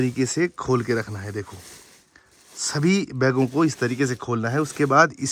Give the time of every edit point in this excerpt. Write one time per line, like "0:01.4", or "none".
none